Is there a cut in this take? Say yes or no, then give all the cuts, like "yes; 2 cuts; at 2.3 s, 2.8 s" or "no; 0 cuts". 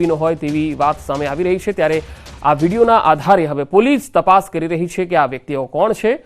yes; 1 cut; at 4.1 s